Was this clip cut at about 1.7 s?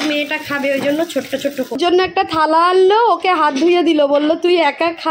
yes; 1 cut; at 1.7 s

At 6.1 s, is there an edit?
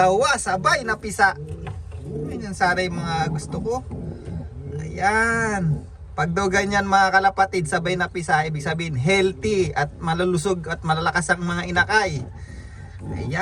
no; 0 cuts

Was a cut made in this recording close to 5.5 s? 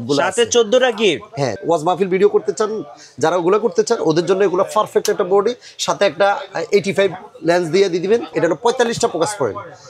no; 2 cuts; at 1.6 s, 8.3 s

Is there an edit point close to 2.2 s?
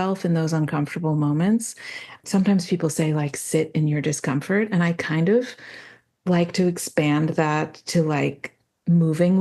yes; 1 cut; at 2.2 s

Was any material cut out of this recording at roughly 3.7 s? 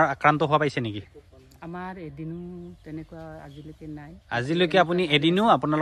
no; 0 cuts

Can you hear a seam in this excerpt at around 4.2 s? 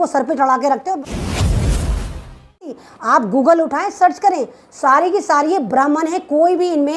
no; 2 cuts; at 1.0 s, 2.7 s

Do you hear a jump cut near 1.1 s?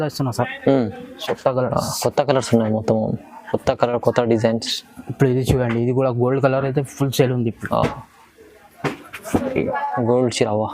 yes; 1 cut; at 1.1 s

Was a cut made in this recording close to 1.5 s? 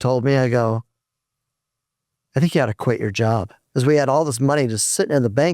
no; 1 cut; at 3.6 s

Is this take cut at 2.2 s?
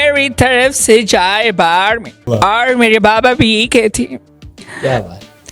yes; 1 cut; at 2.2 s

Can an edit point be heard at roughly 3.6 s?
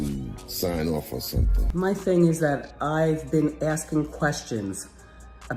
no; 1 cut; at 1.6 s

